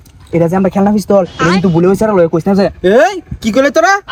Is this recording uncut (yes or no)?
yes